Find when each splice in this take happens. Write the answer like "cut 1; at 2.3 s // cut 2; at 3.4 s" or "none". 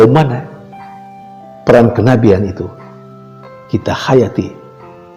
none